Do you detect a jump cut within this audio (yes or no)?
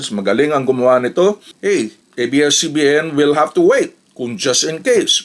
yes